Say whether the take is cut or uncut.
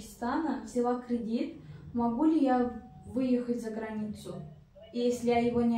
uncut